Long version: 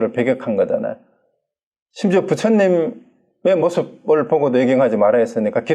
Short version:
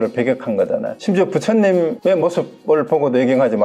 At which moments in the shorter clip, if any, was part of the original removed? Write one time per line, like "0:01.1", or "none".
0:00.9
0:02.0